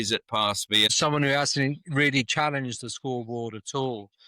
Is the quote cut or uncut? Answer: cut